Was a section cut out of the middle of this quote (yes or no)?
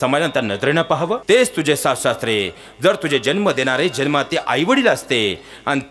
yes